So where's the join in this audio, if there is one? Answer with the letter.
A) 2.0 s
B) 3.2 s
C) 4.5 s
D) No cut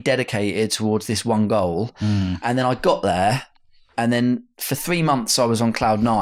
D